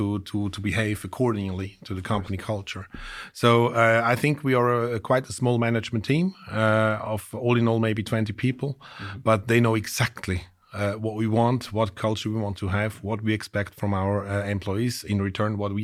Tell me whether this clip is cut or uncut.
uncut